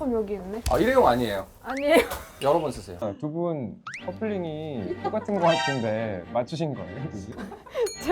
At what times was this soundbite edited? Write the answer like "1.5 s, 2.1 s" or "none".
3.0 s